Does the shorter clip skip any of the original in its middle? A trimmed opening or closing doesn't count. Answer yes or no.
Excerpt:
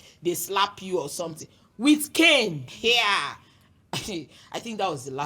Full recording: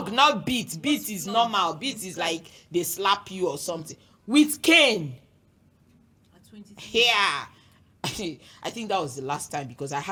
yes